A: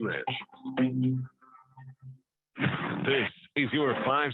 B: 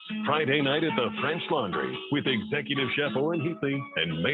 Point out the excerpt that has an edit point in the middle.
A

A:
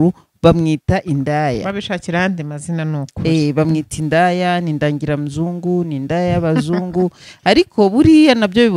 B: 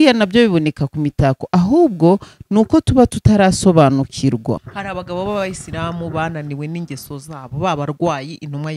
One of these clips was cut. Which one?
B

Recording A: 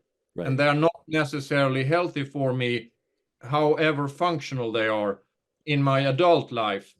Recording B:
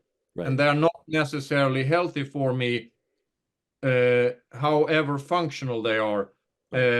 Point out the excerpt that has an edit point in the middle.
A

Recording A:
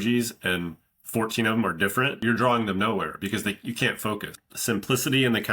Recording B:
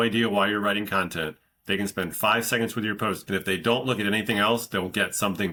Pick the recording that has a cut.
A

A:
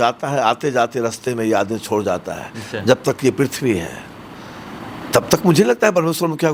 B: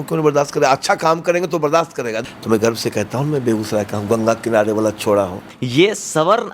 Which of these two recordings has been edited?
B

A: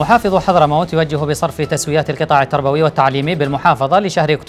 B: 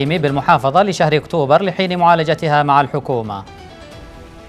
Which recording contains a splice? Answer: B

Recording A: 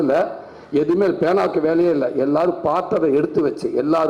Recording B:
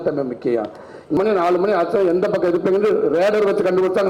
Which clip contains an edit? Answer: B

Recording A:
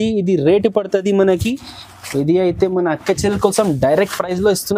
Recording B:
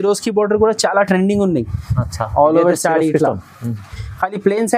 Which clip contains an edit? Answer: A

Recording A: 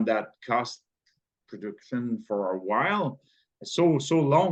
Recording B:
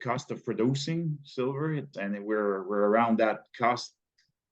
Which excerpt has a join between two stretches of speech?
B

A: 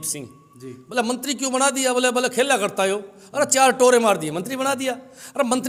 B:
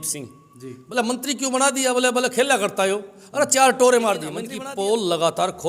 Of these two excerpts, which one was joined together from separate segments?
B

